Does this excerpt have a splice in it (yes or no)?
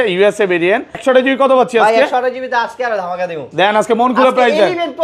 yes